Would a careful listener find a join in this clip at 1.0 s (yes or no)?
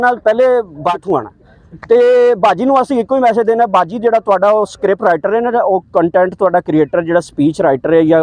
yes